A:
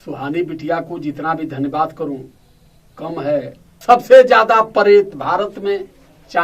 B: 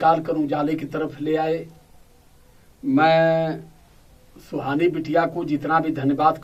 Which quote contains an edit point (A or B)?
A